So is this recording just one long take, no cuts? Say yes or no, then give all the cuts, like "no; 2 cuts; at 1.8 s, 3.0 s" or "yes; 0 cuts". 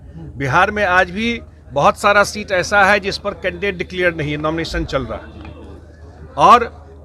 yes; 0 cuts